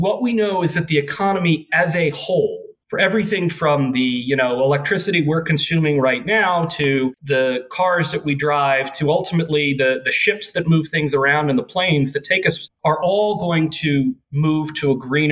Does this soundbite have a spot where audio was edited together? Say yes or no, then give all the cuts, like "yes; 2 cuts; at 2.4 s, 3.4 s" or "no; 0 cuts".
no; 0 cuts